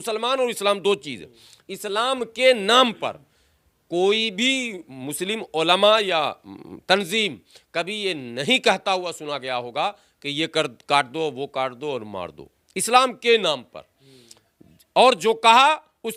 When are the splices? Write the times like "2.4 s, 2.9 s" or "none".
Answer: none